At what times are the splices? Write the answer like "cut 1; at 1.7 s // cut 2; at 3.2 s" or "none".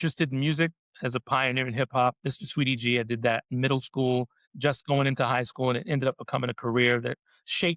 cut 1; at 4.4 s